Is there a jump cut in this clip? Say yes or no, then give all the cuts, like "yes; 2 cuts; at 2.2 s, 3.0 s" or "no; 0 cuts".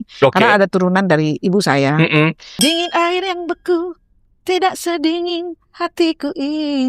yes; 1 cut; at 2.6 s